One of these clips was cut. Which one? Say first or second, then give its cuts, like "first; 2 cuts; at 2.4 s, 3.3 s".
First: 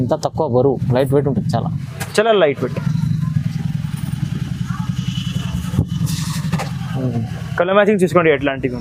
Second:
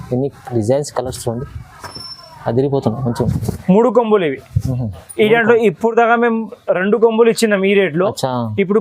second; 1 cut; at 3.3 s